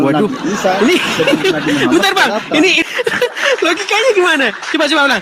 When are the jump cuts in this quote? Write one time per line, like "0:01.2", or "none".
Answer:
0:02.8